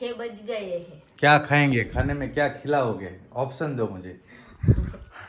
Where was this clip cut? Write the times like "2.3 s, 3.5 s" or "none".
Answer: none